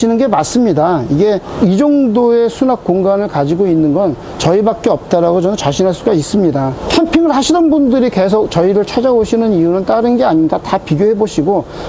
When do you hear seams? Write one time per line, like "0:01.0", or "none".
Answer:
0:01.5
0:06.8